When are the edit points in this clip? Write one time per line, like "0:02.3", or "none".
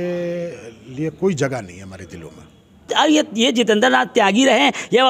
0:02.9